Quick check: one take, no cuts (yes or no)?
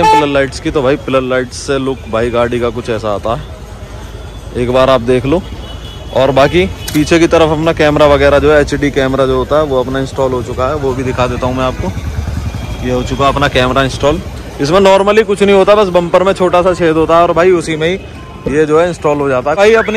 yes